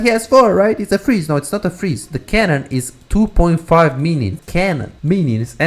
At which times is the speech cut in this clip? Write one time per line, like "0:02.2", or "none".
0:04.7